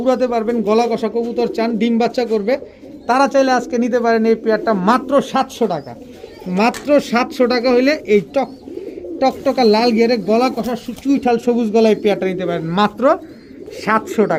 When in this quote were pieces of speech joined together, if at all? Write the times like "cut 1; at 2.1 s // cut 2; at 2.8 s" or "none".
none